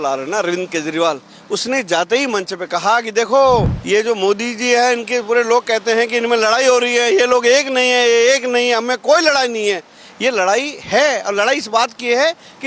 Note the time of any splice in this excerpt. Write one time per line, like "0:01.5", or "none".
0:03.8